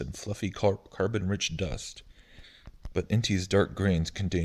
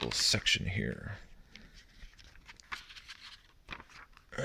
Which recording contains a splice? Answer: second; 1 cut; at 3.3 s

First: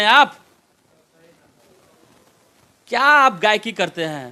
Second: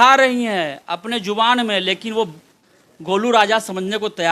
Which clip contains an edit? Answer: second; 1 cut; at 2.6 s

